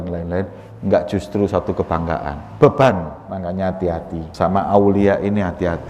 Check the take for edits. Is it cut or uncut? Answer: cut